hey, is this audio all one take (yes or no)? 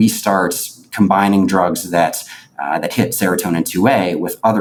yes